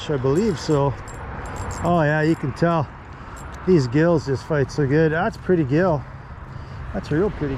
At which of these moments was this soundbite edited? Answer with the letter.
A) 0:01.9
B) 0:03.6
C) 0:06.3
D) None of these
D